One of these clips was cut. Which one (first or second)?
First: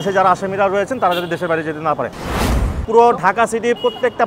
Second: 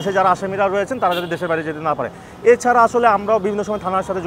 first